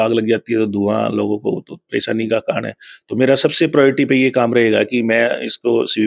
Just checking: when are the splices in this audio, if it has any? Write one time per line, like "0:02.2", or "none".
none

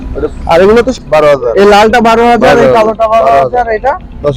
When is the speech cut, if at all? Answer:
0:00.9

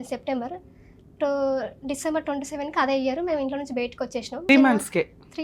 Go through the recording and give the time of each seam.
0:04.5

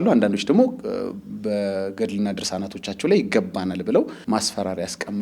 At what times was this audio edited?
0:04.2

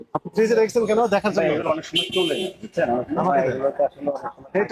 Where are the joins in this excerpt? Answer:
none

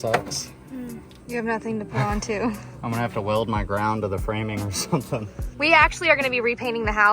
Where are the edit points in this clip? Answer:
0:01.1
0:02.7
0:05.5

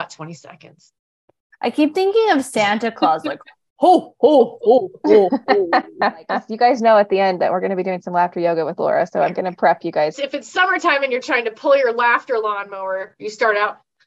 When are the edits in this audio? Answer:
0:06.4
0:10.1

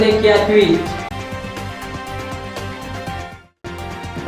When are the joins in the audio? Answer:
none

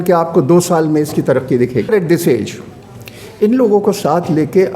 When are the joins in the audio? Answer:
0:01.9

